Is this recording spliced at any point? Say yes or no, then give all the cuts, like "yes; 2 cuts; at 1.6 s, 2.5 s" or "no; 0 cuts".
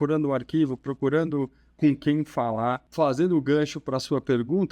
yes; 1 cut; at 2.9 s